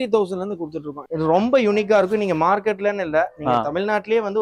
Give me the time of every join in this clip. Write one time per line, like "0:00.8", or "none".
0:01.0